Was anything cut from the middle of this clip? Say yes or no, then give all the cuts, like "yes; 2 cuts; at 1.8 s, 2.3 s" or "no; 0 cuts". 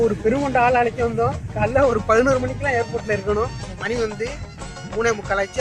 no; 0 cuts